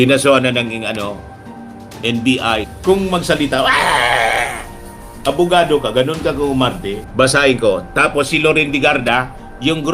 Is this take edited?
yes; 1 cut; at 7.0 s

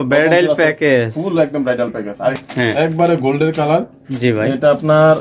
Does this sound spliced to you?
yes; 1 cut; at 2.3 s

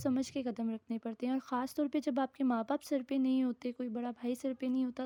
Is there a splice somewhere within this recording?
no; 0 cuts

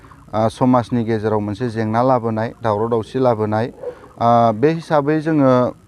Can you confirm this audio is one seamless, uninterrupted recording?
yes; 0 cuts

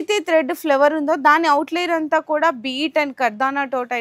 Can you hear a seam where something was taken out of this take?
no; 0 cuts

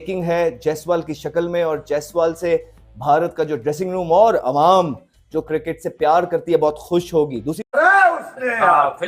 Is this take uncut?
no; 1 cut; at 7.8 s

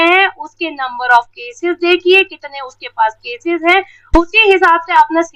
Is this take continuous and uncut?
yes; 0 cuts

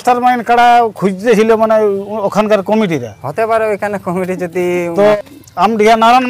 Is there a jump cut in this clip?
yes; 1 cut; at 5.4 s

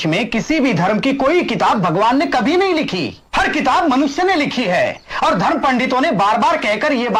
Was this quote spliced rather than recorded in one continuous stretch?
no; 0 cuts

